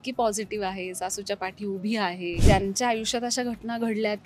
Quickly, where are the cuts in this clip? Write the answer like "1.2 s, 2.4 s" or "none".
2.4 s